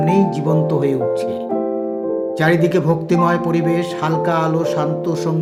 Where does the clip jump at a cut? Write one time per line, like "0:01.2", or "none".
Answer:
none